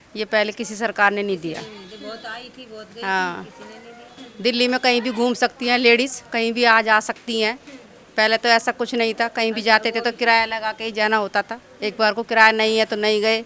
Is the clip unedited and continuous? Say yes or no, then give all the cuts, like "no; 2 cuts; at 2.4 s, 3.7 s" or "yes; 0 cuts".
yes; 0 cuts